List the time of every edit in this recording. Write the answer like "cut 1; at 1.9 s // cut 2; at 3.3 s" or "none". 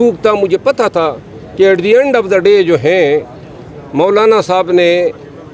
none